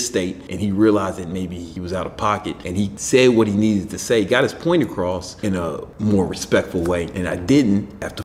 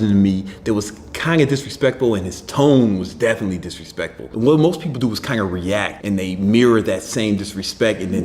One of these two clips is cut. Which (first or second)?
second